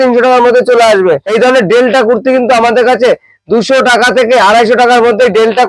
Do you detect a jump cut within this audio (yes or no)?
yes